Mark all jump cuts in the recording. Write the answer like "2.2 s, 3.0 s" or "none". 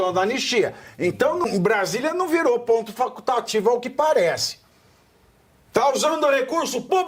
1.5 s